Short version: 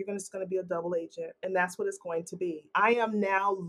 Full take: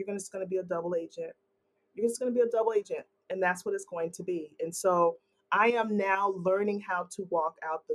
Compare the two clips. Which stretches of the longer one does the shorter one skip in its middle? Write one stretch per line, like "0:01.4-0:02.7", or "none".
0:01.3-0:03.2
0:04.5-0:05.4